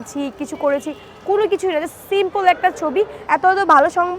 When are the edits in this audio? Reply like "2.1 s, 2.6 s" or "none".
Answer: 3.2 s